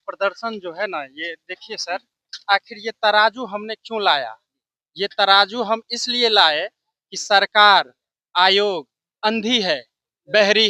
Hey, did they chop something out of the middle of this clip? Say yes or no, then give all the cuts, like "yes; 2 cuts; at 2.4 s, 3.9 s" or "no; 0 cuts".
no; 0 cuts